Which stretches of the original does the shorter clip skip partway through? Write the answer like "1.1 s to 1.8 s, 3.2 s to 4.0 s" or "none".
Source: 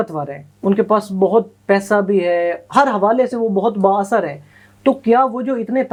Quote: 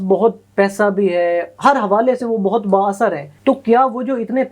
4.4 s to 4.7 s

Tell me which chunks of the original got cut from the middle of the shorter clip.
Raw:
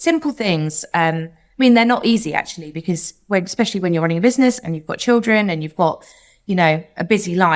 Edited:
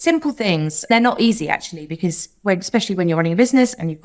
0.9 s to 1.8 s

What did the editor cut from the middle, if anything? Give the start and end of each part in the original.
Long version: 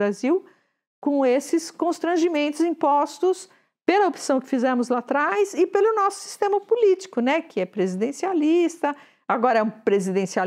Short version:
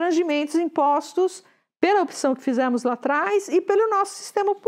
none

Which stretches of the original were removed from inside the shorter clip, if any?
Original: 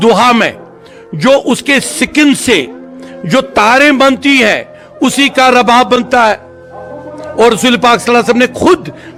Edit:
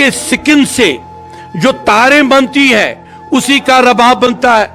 none

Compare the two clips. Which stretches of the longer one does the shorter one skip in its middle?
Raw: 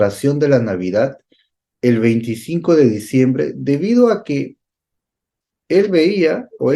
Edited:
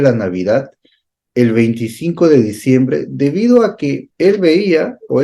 4.5 s to 5.6 s

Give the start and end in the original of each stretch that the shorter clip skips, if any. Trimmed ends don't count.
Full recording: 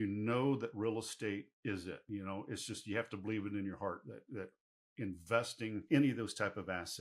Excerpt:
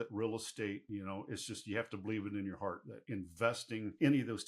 1.5 s to 2.0 s, 4.1 s to 4.8 s

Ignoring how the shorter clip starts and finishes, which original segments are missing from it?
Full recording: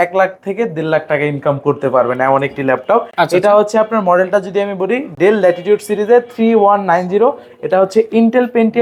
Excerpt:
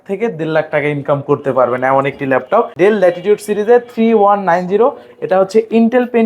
3.1 s to 5.1 s

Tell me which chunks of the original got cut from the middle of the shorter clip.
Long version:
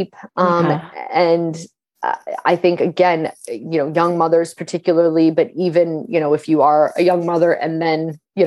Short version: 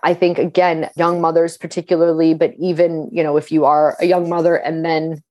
3.4 s to 3.9 s

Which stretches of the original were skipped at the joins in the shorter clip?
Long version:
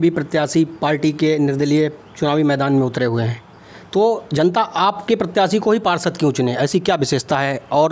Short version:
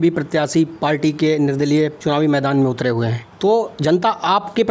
2.0 s to 2.1 s, 3.4 s to 3.7 s

